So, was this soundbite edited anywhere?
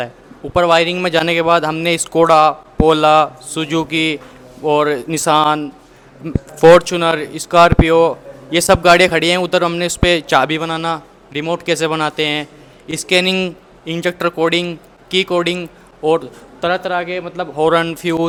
no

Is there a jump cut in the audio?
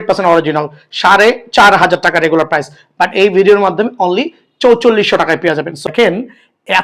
yes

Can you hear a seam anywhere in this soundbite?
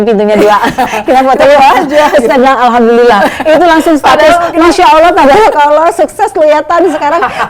no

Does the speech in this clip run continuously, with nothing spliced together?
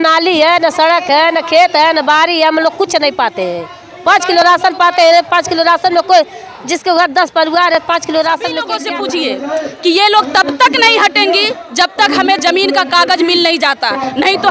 no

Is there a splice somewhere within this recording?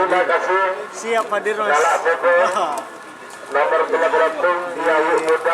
no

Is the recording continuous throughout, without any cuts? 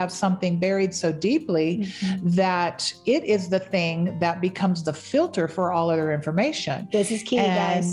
yes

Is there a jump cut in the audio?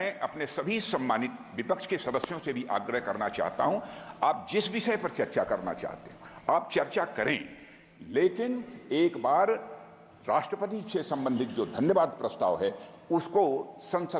no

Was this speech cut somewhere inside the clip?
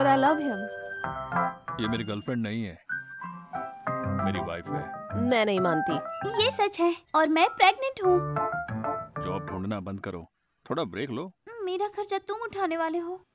yes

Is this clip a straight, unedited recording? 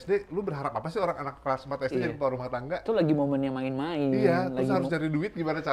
yes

